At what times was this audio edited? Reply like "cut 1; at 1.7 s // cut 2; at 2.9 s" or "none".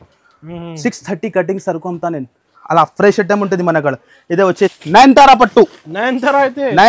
cut 1; at 4.8 s